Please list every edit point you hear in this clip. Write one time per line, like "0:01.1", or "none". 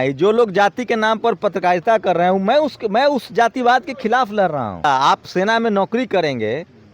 0:04.8